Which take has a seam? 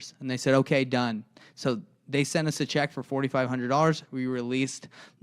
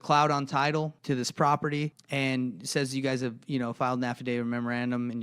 second; 2 cuts; at 1.0 s, 2.0 s

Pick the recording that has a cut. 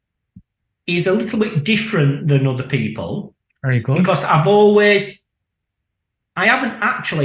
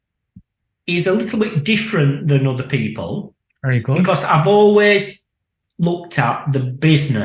second; 1 cut; at 5.6 s

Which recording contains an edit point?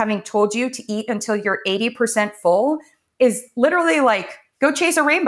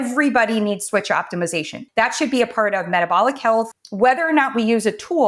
second; 1 cut; at 1.8 s

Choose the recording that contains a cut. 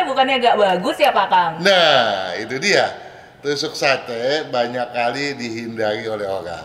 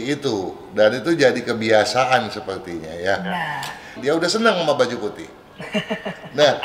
second; 1 cut; at 4.0 s

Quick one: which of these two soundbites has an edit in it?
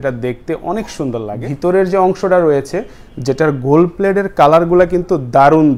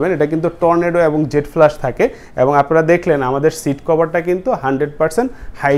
first; 1 cut; at 1.3 s

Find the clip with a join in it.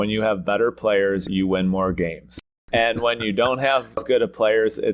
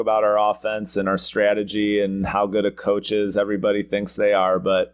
first; 3 cuts; at 1.2 s, 2.6 s, 4.0 s

